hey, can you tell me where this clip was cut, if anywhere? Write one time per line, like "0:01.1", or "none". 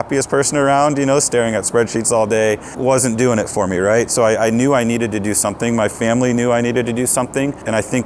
none